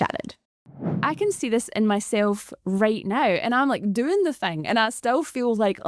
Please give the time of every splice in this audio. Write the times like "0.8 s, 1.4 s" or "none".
0.9 s